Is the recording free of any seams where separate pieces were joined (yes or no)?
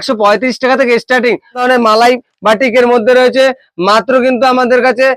no